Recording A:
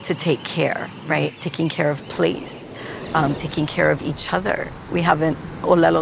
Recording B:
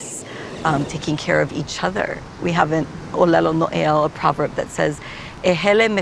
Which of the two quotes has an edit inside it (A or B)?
A